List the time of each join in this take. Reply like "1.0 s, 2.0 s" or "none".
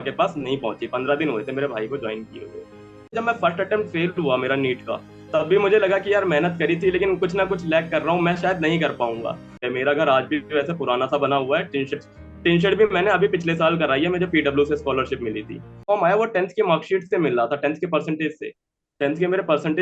3.1 s, 9.6 s, 15.8 s